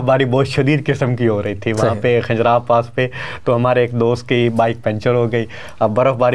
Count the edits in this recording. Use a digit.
0